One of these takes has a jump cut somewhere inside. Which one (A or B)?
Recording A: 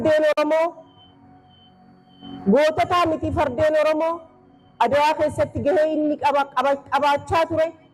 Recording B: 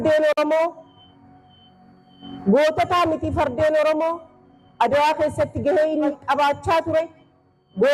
B